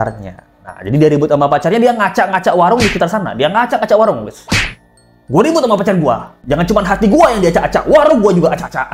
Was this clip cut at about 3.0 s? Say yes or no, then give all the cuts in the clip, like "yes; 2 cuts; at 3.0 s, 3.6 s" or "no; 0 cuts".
no; 0 cuts